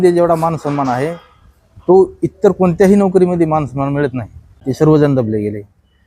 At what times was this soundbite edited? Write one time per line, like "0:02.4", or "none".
0:04.6